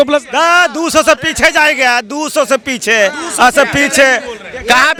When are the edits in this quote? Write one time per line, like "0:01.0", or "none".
none